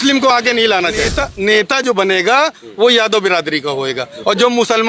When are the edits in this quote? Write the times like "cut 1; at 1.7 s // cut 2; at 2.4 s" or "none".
cut 1; at 1.2 s